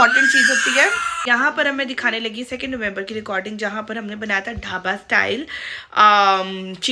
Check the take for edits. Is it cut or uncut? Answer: cut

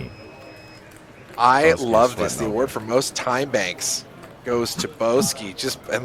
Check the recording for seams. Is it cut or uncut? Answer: uncut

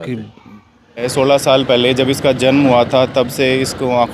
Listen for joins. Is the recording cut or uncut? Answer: cut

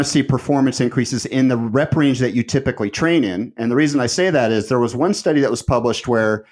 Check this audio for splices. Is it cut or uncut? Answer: uncut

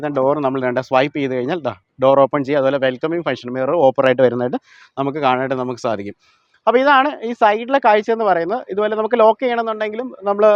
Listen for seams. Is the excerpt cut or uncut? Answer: uncut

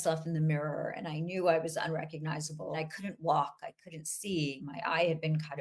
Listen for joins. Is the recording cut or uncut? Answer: cut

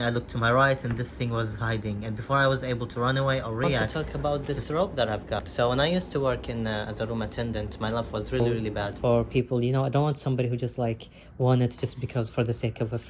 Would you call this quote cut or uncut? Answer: cut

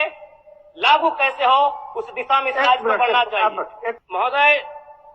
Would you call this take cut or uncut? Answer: cut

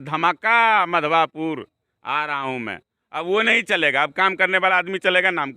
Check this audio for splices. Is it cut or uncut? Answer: uncut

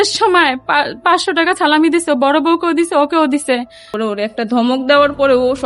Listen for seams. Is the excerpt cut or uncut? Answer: cut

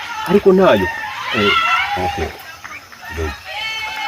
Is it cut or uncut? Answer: uncut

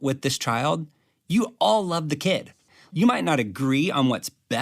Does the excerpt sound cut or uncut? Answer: cut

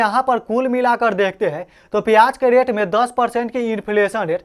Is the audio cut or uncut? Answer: uncut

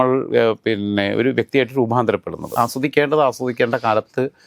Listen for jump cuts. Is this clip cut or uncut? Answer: cut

